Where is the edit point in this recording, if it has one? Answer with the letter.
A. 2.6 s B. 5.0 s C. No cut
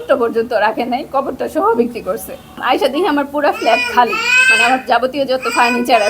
A